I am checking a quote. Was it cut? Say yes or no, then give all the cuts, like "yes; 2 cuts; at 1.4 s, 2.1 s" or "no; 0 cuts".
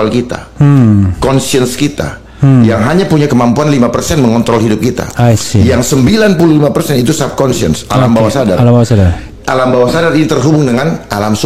no; 0 cuts